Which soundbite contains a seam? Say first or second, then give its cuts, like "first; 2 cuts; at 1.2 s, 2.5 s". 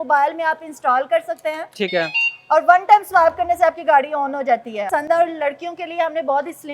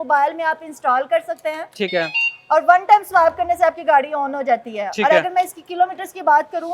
first; 1 cut; at 4.8 s